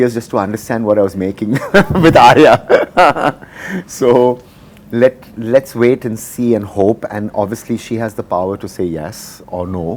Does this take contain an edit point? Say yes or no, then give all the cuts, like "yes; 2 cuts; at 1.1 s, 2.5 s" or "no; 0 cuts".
no; 0 cuts